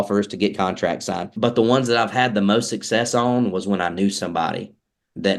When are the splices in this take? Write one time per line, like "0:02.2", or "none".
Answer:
0:01.3